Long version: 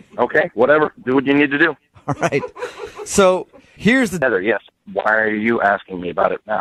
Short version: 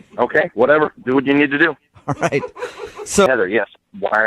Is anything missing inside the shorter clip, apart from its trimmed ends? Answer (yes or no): yes